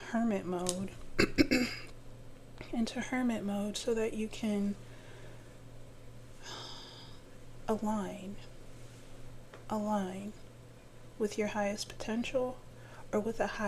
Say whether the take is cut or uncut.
uncut